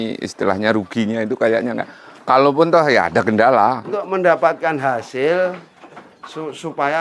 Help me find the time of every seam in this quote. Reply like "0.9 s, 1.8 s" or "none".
4.0 s